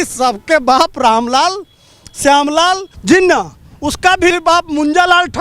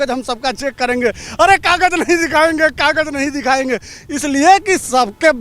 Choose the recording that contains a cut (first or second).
first